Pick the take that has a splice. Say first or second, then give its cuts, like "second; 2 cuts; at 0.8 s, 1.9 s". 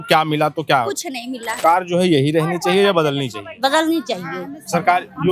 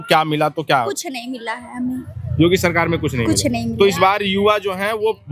first; 1 cut; at 1.6 s